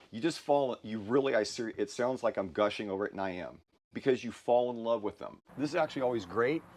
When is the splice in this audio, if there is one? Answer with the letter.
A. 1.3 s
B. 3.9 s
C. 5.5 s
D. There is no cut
C